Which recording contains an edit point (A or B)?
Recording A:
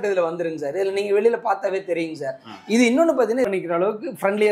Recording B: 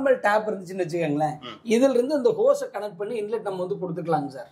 A